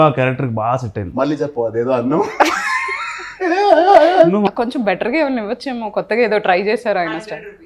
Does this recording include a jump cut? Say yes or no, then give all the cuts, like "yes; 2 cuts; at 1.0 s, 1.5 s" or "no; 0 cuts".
yes; 1 cut; at 4.5 s